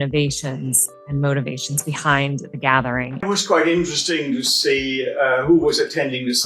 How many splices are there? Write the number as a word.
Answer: one